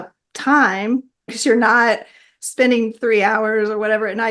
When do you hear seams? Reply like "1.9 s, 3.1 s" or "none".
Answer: 1.3 s